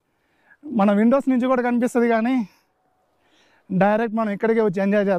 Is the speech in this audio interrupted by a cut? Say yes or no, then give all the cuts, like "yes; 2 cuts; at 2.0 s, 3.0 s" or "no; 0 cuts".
no; 0 cuts